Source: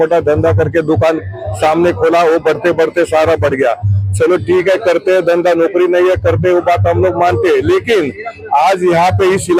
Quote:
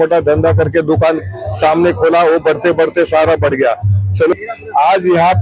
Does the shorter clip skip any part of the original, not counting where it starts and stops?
yes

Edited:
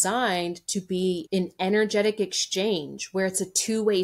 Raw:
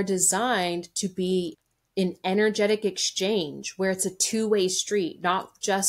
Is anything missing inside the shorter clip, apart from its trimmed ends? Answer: yes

